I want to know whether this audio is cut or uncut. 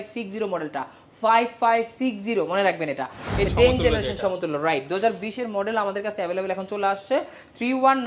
cut